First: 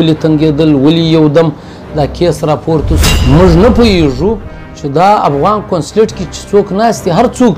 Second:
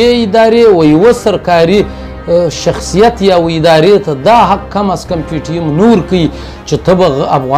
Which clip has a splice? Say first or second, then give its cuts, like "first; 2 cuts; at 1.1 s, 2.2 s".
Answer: first; 1 cut; at 3.1 s